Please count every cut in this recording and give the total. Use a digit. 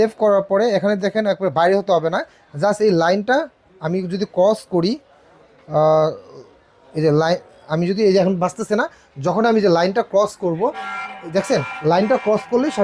0